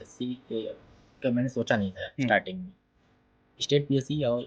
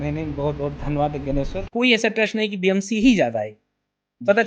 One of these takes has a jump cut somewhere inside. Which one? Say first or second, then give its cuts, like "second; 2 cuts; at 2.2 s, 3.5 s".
second; 1 cut; at 1.6 s